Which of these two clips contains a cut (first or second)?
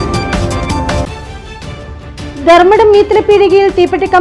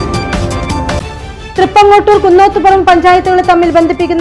first